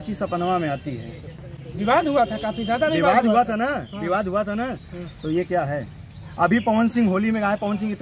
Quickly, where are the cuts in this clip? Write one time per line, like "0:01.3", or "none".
none